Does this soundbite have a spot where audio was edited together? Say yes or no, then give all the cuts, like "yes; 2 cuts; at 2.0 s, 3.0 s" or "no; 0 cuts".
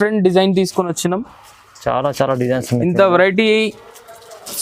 no; 0 cuts